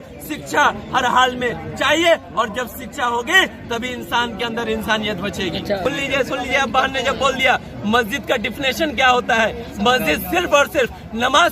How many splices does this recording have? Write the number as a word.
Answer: one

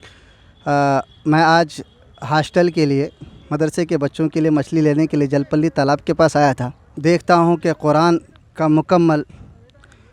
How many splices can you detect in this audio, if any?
one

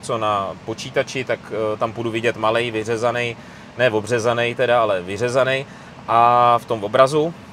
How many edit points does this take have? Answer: zero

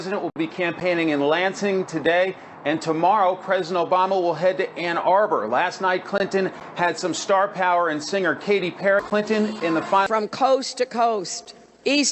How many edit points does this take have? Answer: one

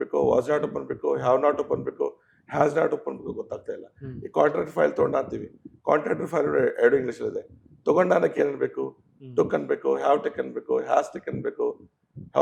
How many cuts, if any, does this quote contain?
zero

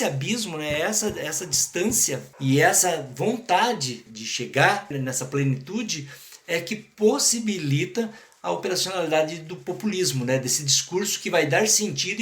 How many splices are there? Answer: one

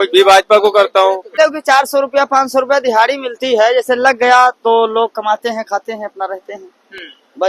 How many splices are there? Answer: one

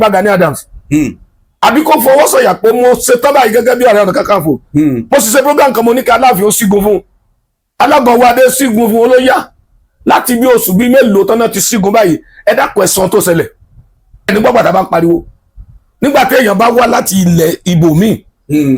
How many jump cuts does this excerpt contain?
one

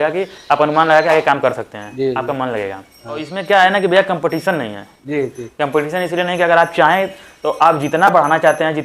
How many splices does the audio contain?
one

